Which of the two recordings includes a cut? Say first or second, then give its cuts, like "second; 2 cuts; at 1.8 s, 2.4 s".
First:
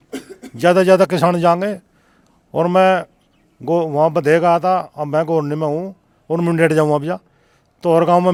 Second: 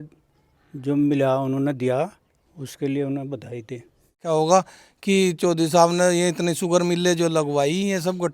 second; 1 cut; at 4.2 s